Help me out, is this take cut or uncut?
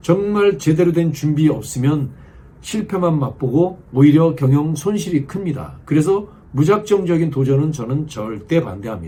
uncut